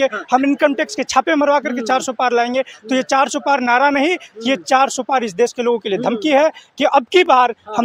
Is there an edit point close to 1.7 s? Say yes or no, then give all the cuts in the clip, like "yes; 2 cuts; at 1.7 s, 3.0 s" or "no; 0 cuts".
no; 0 cuts